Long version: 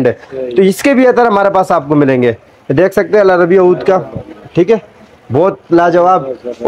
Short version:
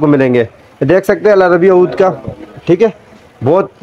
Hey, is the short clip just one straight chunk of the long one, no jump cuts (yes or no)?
yes